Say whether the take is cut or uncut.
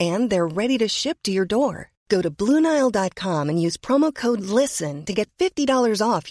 uncut